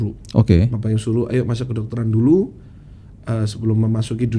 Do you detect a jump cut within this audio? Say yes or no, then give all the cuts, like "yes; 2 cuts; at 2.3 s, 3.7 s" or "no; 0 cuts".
no; 0 cuts